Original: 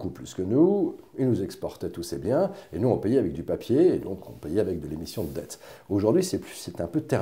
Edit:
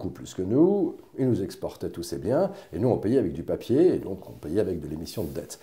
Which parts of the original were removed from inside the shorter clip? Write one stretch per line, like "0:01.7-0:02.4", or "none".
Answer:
none